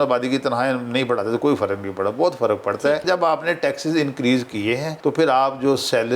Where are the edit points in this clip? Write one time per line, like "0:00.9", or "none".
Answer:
0:03.0